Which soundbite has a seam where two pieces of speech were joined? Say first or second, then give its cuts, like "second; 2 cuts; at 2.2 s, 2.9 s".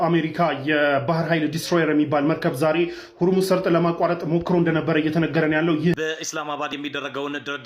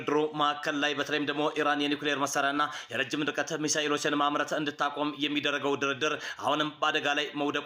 first; 1 cut; at 5.9 s